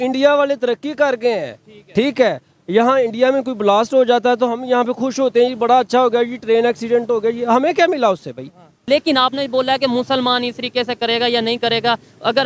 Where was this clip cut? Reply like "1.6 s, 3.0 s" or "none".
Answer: 8.8 s

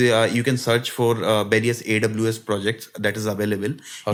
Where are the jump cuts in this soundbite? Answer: none

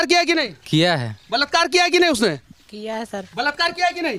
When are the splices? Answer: none

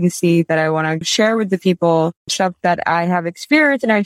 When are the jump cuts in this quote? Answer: 1.1 s, 2.2 s

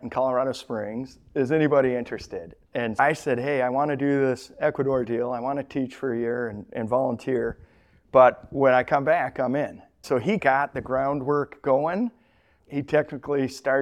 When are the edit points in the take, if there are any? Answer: 3.0 s, 10.0 s

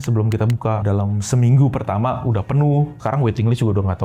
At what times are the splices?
0.8 s, 2.9 s

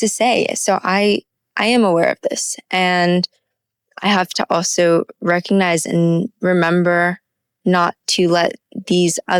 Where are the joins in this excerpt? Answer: none

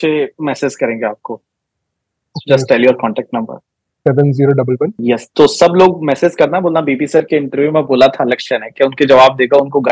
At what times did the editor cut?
5.0 s

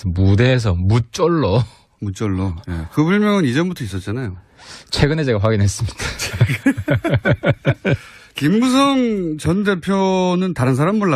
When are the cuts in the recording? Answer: 5.0 s

